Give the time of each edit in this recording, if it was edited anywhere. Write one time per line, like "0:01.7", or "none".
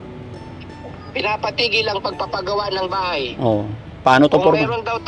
none